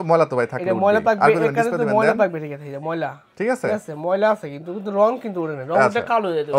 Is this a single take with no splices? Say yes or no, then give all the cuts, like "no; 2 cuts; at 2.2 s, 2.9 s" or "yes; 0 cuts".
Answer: yes; 0 cuts